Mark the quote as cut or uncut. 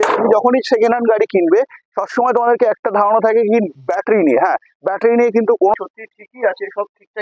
cut